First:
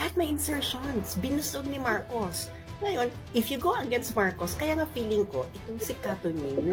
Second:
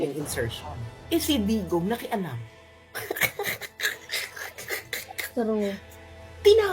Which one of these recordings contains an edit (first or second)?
second